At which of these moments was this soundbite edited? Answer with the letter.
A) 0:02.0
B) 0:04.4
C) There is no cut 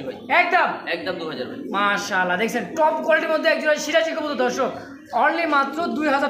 C